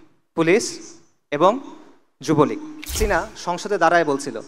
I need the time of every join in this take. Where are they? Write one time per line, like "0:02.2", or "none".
0:03.0